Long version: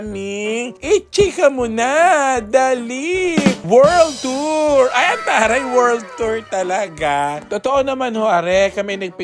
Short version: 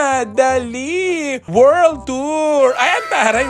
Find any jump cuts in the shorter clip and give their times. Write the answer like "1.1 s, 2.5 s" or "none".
none